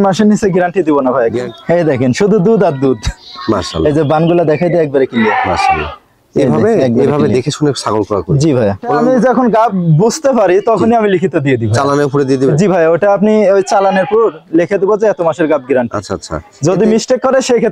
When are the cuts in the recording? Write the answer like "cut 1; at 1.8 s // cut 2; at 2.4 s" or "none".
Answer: cut 1; at 1.4 s // cut 2; at 9.0 s